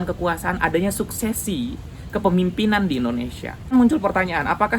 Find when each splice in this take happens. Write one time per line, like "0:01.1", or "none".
0:03.5